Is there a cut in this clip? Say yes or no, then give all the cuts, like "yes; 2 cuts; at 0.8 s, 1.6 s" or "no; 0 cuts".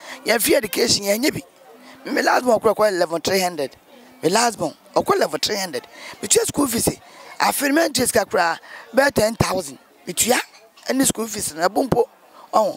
no; 0 cuts